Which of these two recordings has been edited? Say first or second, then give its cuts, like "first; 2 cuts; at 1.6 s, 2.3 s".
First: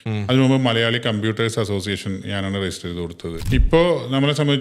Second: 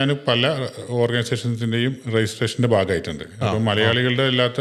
first; 1 cut; at 3.4 s